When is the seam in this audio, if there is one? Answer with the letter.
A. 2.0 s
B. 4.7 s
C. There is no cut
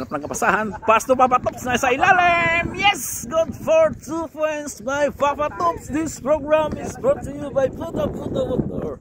C